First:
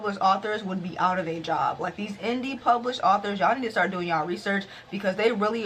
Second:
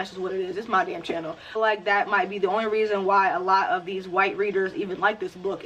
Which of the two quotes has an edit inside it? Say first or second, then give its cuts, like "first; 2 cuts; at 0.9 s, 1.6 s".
second; 1 cut; at 1.5 s